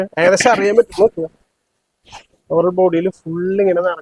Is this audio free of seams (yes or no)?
yes